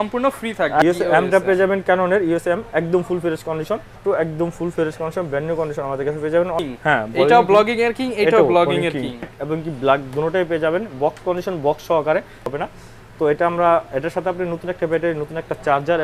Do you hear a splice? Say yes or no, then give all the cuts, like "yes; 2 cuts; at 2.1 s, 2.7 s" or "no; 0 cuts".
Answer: yes; 5 cuts; at 0.8 s, 4.0 s, 6.6 s, 9.3 s, 12.5 s